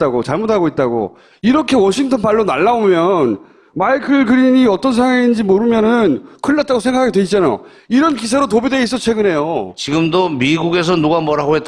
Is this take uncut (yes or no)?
no